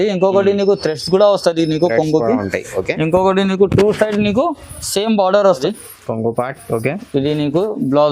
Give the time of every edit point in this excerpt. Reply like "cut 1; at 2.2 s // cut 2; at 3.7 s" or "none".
cut 1; at 5.6 s